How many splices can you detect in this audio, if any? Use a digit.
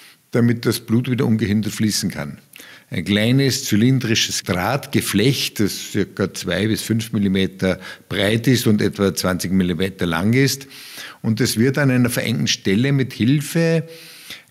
1